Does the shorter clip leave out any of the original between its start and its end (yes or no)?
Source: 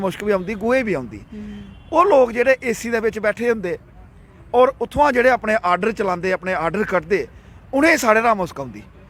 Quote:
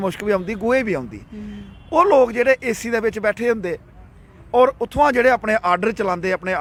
no